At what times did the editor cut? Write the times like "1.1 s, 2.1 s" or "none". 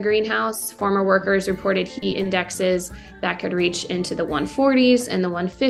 none